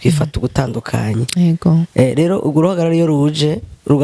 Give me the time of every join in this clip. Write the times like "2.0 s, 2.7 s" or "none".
none